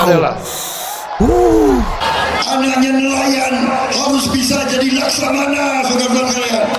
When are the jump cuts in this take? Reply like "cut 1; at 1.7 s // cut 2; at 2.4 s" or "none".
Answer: cut 1; at 2.0 s